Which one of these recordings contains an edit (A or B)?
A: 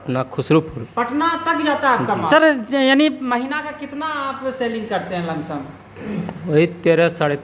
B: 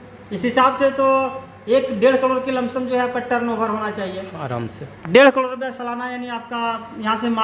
A